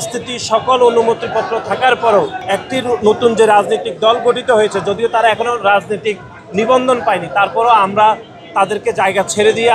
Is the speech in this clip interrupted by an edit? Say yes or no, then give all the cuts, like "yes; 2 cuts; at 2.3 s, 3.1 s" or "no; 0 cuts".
yes; 1 cut; at 2.4 s